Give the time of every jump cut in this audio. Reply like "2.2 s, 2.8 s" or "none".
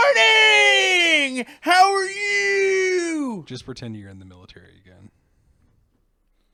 none